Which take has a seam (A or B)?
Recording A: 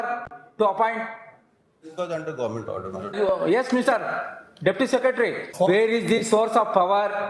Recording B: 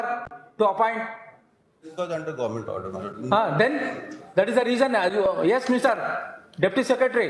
A